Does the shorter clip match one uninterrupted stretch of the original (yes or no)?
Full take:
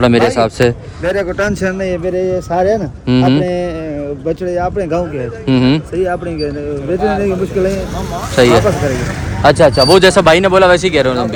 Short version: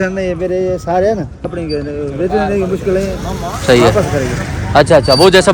no